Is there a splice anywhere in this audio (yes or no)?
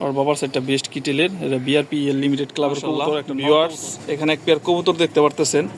yes